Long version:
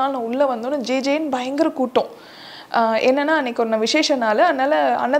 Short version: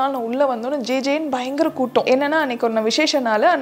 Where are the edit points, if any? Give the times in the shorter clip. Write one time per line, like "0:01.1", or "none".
0:02.1